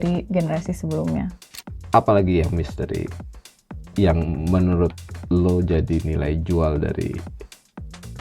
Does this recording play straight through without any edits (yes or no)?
no